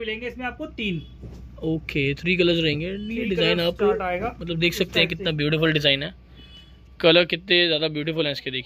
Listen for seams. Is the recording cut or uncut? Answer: uncut